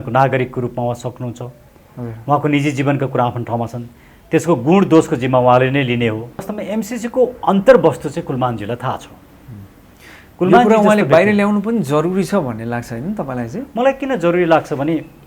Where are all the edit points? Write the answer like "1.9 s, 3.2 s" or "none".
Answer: 6.6 s